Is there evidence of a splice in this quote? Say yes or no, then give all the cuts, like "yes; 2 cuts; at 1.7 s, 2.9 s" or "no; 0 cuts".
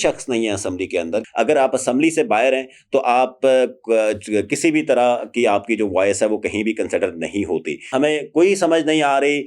yes; 2 cuts; at 1.2 s, 7.9 s